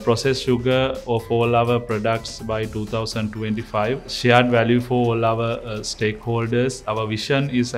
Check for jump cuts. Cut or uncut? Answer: cut